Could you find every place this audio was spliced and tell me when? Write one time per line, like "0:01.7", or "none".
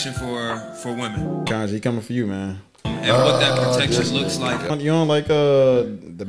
0:01.5
0:04.7